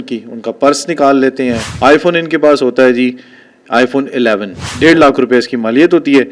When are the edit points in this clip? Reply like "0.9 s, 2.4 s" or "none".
1.6 s, 4.7 s